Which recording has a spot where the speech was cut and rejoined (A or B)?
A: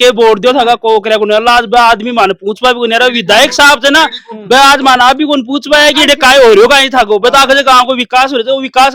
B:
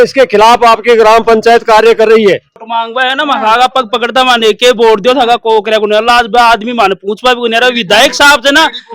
B